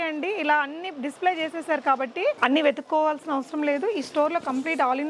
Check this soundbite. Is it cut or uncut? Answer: cut